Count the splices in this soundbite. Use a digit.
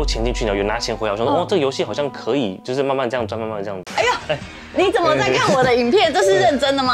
1